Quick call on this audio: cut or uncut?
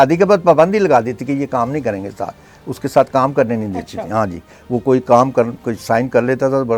uncut